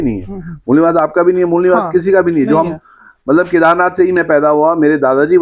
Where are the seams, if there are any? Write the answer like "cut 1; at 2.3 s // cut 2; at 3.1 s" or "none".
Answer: none